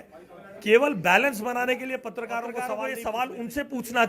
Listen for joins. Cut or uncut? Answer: cut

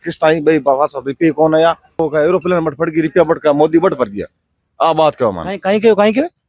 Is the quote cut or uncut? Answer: cut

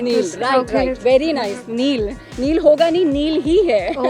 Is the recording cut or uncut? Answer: uncut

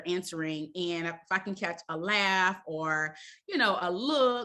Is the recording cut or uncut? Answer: uncut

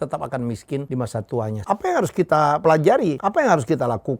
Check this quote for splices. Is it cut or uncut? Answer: cut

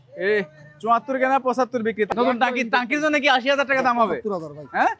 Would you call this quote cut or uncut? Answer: cut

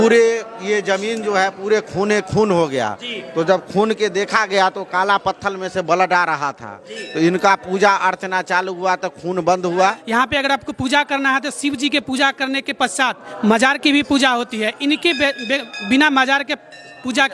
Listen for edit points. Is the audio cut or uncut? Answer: cut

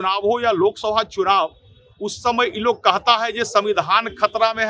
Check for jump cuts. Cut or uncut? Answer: uncut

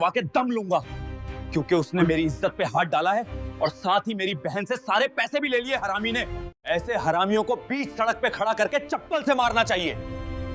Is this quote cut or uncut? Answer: uncut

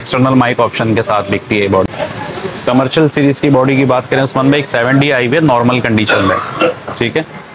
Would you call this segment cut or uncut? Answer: cut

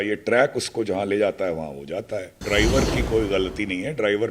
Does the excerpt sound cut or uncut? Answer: cut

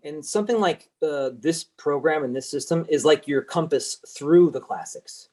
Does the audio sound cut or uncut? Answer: uncut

